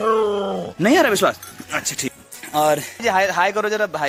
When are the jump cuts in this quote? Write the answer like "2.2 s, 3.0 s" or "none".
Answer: none